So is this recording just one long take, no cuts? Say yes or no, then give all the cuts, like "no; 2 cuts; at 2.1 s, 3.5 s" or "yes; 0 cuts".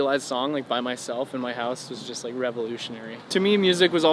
no; 1 cut; at 3.2 s